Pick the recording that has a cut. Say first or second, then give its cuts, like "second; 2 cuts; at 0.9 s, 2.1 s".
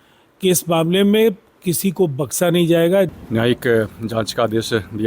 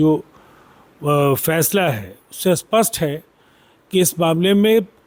first; 1 cut; at 3.1 s